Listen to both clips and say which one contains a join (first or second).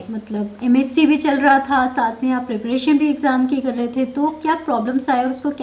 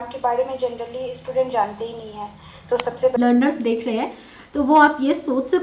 second